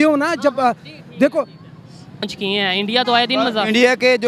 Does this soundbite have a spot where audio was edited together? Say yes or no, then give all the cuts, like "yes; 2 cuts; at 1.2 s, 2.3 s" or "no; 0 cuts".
yes; 1 cut; at 2.2 s